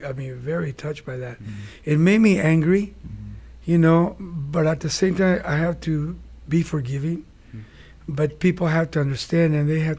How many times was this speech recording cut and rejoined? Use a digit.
0